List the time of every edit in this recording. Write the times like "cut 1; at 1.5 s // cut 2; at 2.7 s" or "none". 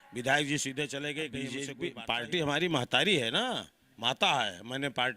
cut 1; at 1.6 s